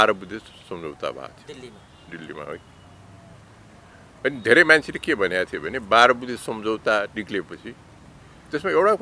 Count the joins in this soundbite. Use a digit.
0